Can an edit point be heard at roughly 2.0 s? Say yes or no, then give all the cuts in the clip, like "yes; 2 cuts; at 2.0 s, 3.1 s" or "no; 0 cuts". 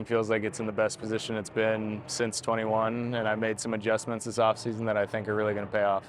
no; 0 cuts